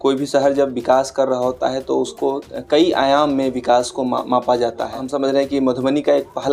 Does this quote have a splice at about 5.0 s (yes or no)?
yes